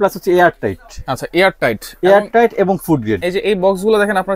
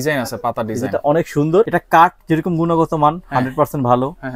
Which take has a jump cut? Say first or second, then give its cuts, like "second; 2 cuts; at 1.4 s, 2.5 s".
second; 1 cut; at 1.7 s